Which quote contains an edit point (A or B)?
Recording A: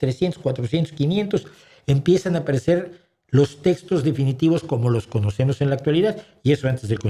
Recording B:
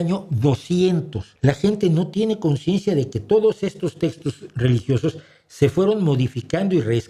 B